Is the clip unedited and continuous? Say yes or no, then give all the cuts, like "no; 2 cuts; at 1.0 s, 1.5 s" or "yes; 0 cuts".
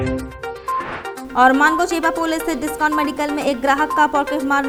yes; 0 cuts